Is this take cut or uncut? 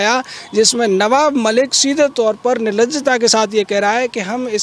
uncut